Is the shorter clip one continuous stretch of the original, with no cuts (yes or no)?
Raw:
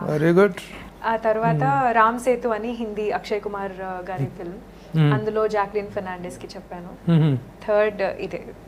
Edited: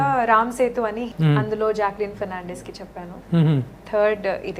no